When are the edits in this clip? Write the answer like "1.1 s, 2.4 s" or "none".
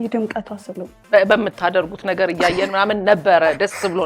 1.0 s